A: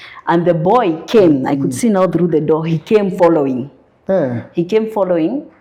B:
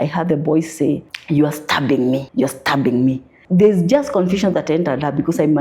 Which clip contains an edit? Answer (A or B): B